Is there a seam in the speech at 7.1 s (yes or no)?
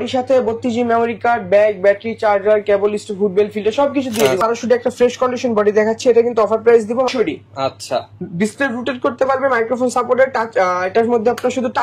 yes